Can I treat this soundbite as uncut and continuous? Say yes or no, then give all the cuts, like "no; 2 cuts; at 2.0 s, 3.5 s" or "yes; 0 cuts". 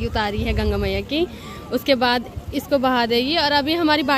yes; 0 cuts